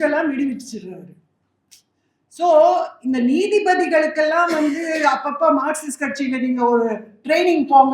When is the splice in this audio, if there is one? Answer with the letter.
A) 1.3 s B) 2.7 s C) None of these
C